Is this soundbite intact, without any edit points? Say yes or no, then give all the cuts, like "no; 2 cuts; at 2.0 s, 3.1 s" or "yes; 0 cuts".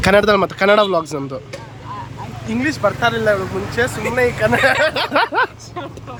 yes; 0 cuts